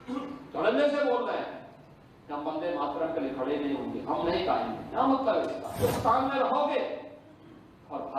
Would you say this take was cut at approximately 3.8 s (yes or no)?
no